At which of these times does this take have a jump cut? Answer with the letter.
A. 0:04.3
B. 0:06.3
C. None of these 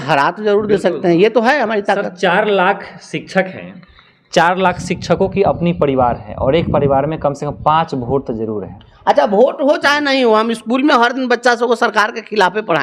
C